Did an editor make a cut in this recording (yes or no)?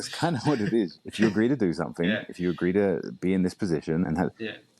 yes